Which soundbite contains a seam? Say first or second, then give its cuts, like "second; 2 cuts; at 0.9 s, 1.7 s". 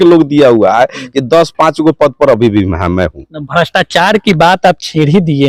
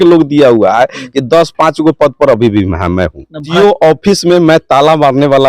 second; 1 cut; at 3.5 s